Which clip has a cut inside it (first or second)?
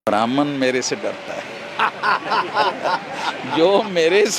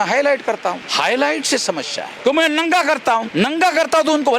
second